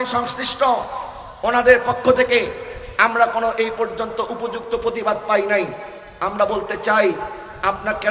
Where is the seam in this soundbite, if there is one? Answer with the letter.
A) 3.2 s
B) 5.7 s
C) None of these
C